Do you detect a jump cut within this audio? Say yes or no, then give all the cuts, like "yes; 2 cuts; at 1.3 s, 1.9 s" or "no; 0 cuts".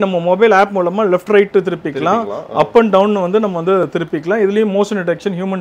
no; 0 cuts